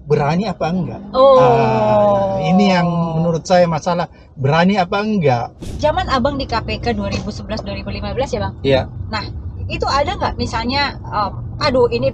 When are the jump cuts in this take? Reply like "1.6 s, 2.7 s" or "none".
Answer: 5.6 s